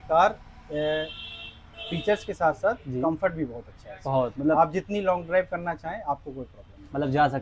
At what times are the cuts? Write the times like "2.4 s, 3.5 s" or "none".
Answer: none